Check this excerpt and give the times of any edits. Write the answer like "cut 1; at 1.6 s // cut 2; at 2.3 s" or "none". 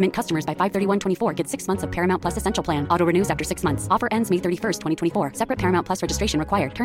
none